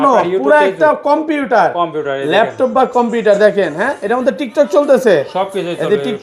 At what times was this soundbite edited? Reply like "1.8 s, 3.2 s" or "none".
none

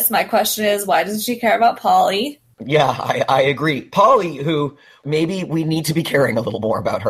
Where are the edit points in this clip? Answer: 2.6 s, 5.0 s

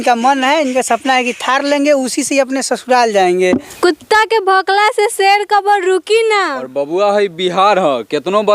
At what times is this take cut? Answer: 3.7 s

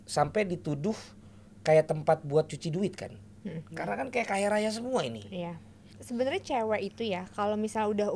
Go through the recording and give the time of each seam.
5.9 s

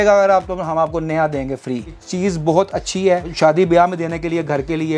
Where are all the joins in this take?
2.0 s, 3.3 s

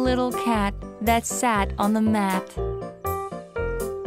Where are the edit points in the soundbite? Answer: 2.4 s

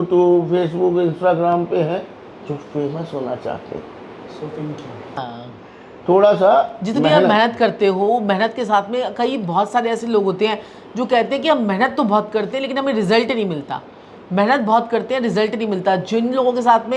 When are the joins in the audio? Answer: none

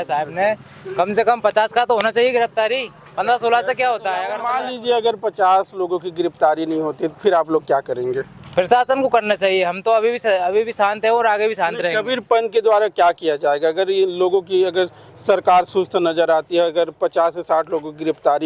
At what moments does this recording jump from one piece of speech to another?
4.4 s

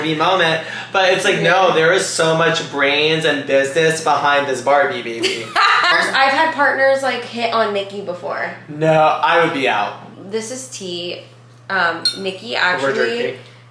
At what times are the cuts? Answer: 5.8 s, 10.1 s

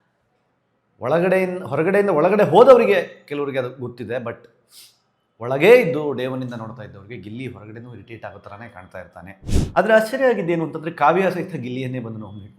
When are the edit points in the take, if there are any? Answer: 9.5 s

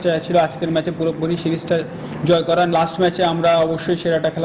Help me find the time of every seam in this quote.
2.7 s

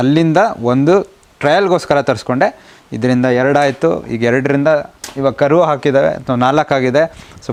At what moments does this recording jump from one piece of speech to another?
none

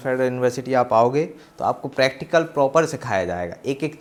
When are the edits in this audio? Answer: none

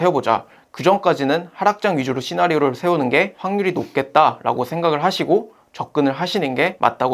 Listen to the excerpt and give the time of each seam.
none

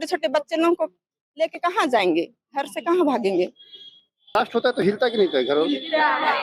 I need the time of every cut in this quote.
4.4 s

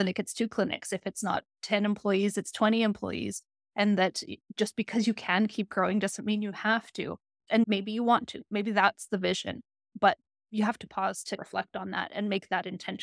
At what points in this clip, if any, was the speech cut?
11.4 s

